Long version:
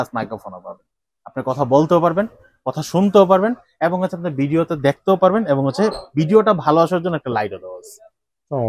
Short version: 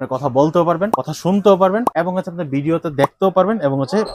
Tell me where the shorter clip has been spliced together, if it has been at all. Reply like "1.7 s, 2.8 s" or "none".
1.1 s, 1.9 s